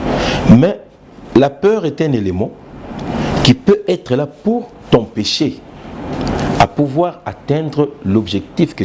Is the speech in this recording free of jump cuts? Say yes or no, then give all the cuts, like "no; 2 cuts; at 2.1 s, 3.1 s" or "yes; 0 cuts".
yes; 0 cuts